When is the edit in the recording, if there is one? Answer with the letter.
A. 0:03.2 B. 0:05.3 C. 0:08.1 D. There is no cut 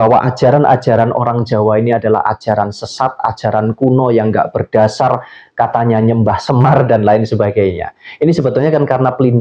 D